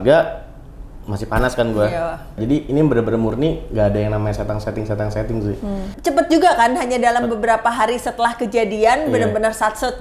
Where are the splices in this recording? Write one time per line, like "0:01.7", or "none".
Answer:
0:02.4
0:05.9